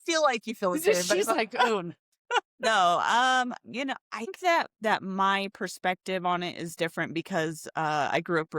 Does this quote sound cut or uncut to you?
cut